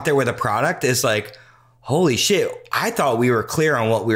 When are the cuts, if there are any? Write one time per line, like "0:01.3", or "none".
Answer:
none